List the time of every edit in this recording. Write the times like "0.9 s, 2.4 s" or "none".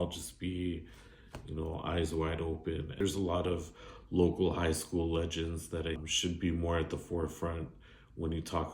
2.9 s, 6.0 s